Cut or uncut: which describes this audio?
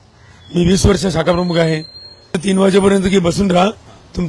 cut